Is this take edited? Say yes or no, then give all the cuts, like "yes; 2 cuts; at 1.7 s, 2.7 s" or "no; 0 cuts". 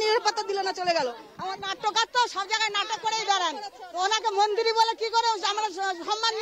yes; 1 cut; at 1.6 s